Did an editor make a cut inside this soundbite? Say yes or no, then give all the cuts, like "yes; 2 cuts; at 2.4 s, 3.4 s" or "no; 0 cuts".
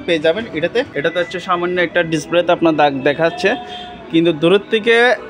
yes; 1 cut; at 0.9 s